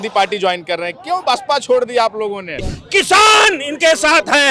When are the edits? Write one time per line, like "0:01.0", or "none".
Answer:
0:02.8